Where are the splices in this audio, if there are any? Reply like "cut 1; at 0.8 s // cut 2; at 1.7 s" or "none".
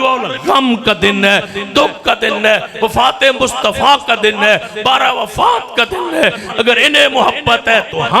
cut 1; at 6.4 s